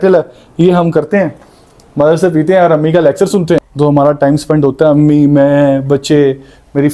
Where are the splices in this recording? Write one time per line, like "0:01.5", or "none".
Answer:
0:03.7